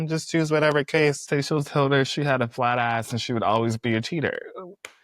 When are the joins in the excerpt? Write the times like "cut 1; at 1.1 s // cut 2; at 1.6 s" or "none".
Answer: cut 1; at 1.2 s

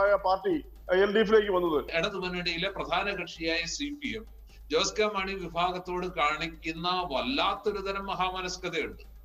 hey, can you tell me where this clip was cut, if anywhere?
cut 1; at 1.9 s

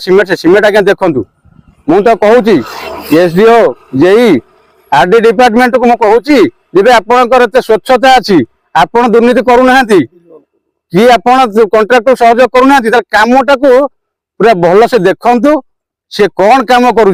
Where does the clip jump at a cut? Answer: none

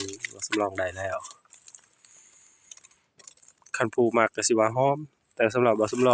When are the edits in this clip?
none

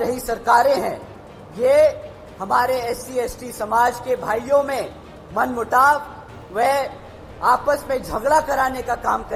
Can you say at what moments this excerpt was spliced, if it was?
none

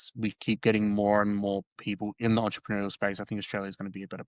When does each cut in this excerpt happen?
cut 1; at 1.8 s

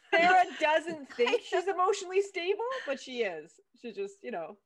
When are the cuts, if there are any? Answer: none

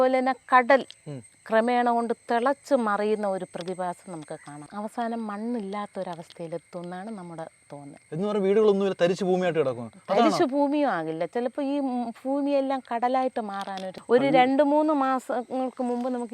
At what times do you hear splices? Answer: cut 1; at 4.6 s // cut 2; at 13.9 s

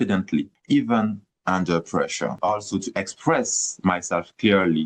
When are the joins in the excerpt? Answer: cut 1; at 2.4 s

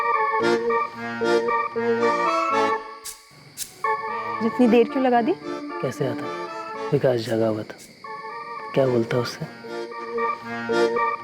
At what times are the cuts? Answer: cut 1; at 10.1 s

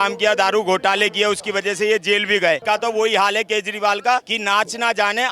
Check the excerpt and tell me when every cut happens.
cut 1; at 2.6 s // cut 2; at 4.3 s

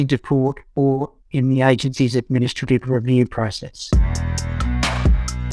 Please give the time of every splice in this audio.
cut 1; at 3.8 s

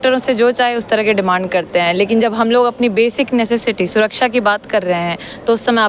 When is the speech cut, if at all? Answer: none

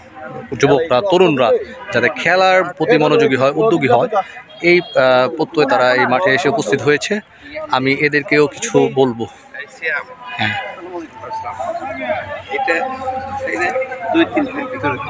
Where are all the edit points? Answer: none

